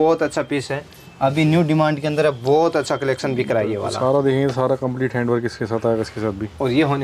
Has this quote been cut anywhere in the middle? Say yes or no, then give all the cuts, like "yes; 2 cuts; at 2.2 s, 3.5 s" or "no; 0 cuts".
no; 0 cuts